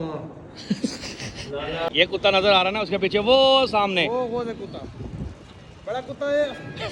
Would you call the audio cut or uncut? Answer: cut